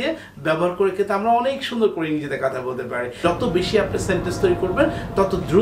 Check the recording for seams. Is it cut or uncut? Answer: cut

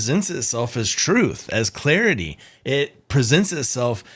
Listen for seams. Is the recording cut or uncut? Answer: uncut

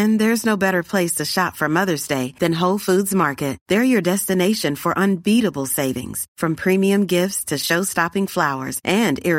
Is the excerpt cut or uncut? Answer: uncut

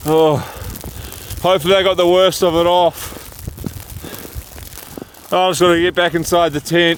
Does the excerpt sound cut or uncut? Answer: uncut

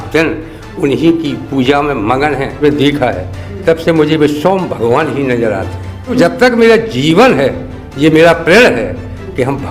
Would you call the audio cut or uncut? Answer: cut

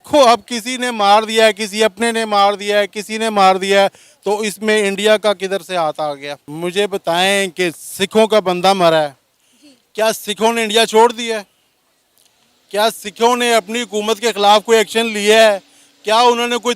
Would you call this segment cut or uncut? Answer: cut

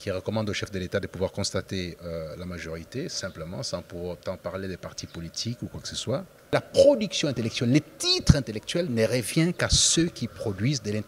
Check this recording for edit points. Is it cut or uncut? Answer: cut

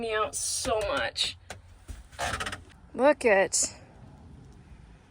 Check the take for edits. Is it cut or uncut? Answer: cut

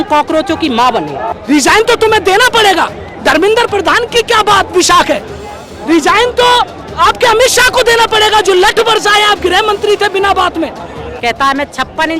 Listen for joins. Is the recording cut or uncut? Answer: cut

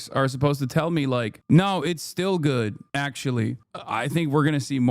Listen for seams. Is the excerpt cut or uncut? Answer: cut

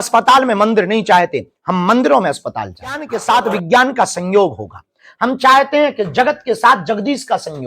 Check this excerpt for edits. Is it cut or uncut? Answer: cut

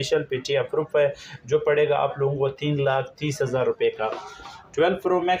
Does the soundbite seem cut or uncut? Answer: uncut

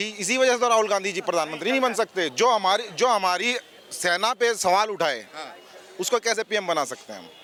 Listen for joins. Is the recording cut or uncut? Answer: uncut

